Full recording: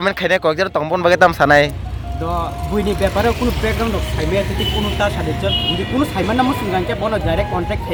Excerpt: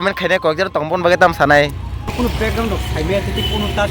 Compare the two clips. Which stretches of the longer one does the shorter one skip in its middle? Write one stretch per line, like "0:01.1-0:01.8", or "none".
0:02.1-0:03.4